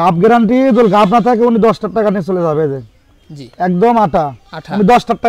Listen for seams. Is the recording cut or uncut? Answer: uncut